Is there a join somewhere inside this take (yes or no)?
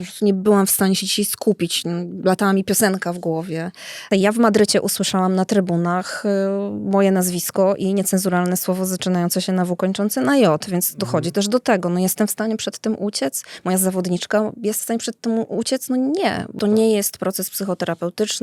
yes